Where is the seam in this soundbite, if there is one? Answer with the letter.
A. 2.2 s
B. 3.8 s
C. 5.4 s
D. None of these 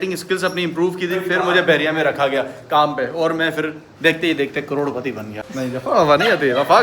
C